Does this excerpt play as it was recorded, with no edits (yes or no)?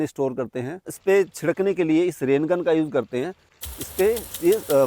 no